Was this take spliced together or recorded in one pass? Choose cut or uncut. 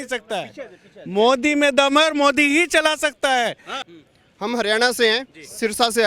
cut